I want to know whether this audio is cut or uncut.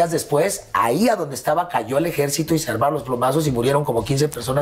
uncut